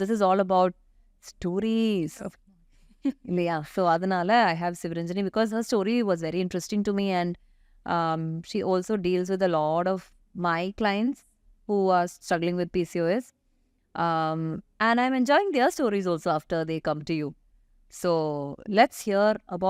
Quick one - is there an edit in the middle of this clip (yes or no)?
no